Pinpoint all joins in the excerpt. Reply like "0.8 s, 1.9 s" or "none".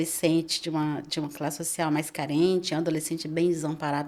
none